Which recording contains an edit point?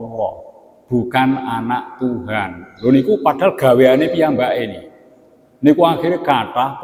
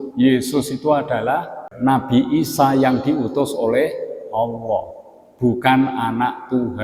second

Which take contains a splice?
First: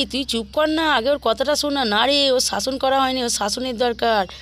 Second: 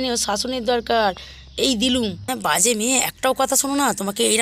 second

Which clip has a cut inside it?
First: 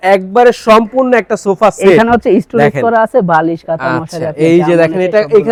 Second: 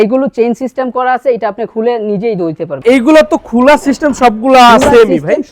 second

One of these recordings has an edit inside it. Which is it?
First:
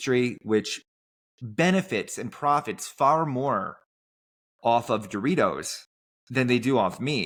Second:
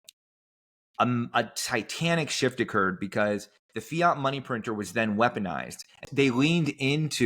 second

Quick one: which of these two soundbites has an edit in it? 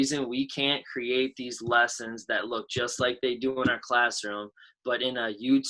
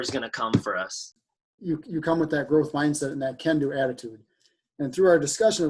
second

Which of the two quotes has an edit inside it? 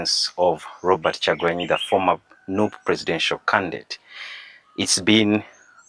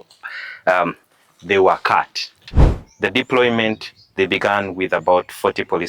second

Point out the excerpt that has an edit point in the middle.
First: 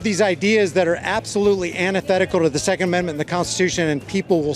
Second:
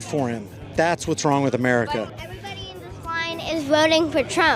second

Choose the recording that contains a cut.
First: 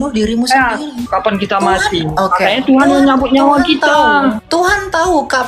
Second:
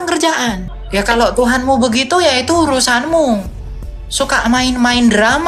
first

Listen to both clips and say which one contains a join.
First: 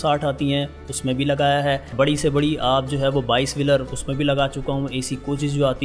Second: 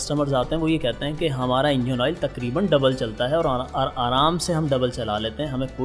first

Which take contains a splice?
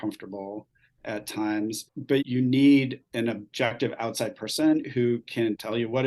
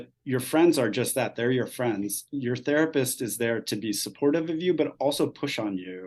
first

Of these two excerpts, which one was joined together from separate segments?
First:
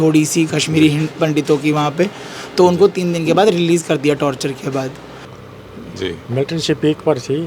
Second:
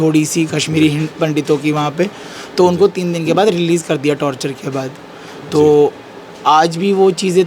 first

